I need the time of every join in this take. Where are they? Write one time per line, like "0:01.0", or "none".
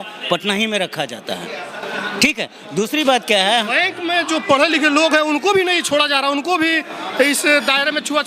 none